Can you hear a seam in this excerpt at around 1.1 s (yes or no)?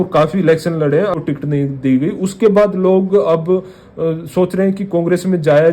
yes